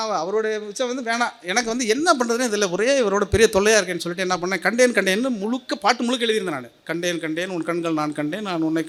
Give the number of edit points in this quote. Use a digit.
0